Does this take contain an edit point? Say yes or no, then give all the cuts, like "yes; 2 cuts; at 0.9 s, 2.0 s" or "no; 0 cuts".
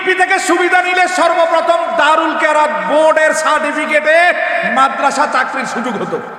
no; 0 cuts